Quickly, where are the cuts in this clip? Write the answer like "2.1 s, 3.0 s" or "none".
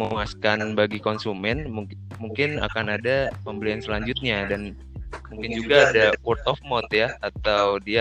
none